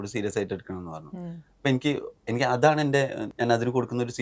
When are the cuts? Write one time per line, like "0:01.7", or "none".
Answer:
0:03.2